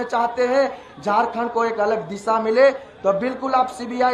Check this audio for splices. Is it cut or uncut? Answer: uncut